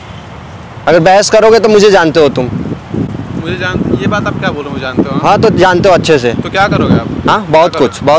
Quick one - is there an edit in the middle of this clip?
no; 0 cuts

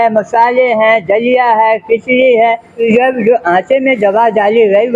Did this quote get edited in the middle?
yes; 1 cut; at 2.8 s

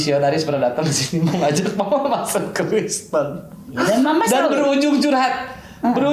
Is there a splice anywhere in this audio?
no; 0 cuts

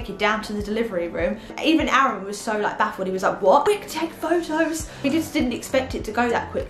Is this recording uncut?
no; 3 cuts; at 1.5 s, 3.7 s, 5.0 s

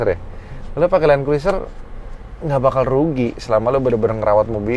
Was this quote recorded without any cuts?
yes; 0 cuts

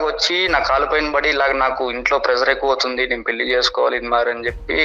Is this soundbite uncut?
yes; 0 cuts

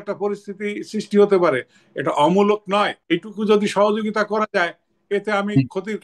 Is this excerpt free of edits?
no; 1 cut; at 3.0 s

